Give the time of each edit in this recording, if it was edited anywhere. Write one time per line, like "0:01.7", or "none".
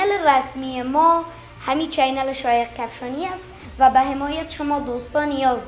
none